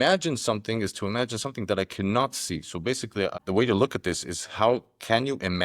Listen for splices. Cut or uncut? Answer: cut